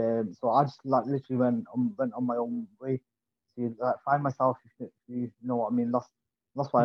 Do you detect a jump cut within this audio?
no; 0 cuts

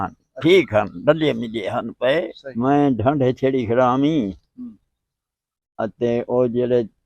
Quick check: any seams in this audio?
yes; 1 cut; at 2.4 s

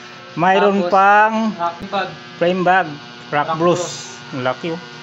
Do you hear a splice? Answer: yes; 1 cut; at 1.8 s

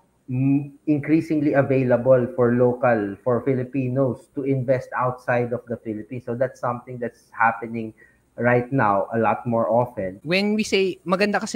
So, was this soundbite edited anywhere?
yes; 1 cut; at 10.2 s

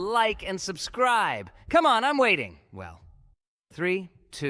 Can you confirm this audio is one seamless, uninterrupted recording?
yes; 0 cuts

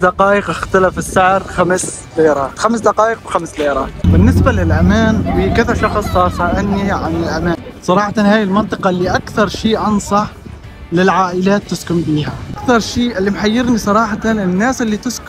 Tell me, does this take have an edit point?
yes; 3 cuts; at 4.0 s, 7.6 s, 12.5 s

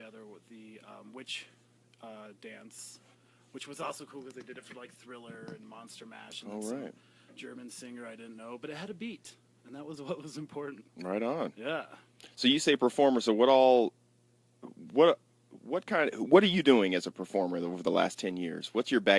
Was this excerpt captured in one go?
yes; 0 cuts

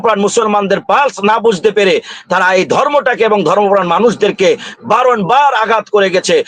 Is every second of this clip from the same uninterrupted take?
yes; 0 cuts

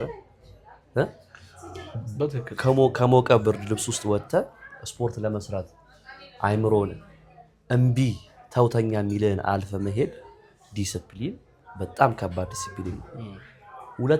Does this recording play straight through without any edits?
yes; 0 cuts

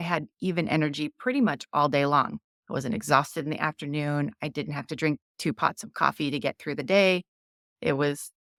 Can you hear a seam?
no; 0 cuts

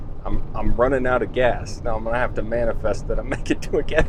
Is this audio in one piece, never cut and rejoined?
yes; 0 cuts

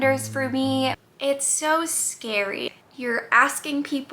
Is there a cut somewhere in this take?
yes; 2 cuts; at 1.1 s, 2.7 s

